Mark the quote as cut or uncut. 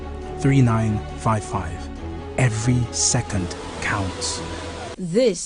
uncut